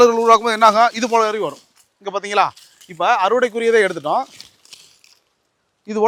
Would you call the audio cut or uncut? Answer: uncut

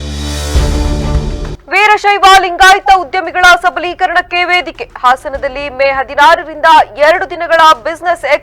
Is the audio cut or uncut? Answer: uncut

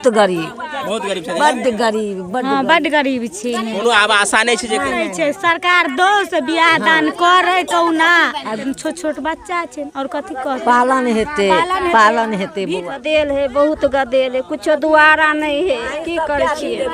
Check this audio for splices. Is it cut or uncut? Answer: cut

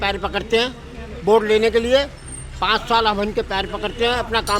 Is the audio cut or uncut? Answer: uncut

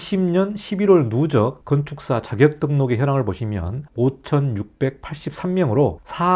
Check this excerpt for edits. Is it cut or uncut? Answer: uncut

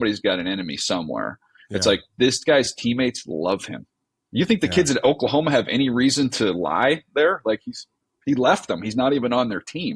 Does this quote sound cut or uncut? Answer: uncut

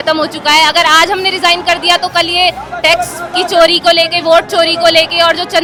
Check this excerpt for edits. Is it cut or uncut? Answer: uncut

